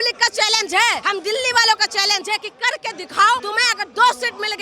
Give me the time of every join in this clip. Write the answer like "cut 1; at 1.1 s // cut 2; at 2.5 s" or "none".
cut 1; at 1.0 s // cut 2; at 3.4 s